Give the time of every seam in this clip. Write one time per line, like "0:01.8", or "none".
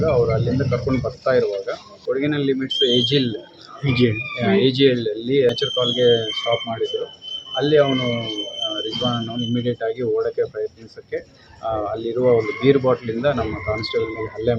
0:01.9
0:05.5